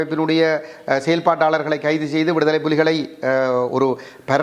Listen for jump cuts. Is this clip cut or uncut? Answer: uncut